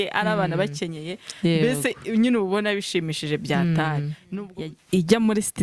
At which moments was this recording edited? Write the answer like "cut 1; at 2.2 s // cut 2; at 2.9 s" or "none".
cut 1; at 4.5 s